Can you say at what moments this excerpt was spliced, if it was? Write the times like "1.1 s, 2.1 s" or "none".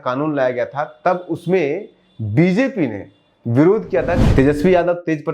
4.2 s